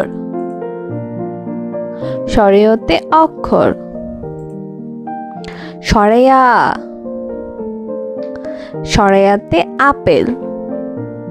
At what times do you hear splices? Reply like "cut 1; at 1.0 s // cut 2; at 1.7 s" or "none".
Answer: cut 1; at 6.9 s // cut 2; at 8.7 s // cut 3; at 10.4 s